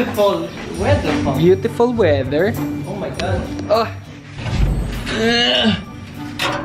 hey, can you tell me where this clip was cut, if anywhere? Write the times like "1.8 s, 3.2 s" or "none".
4.3 s